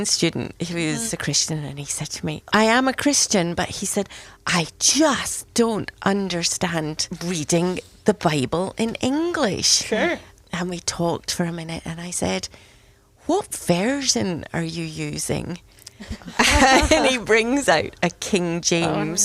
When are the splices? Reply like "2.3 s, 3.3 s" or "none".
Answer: 1.1 s, 2.5 s, 7.1 s, 10.3 s